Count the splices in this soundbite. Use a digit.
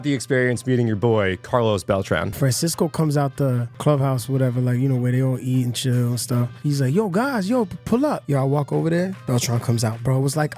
4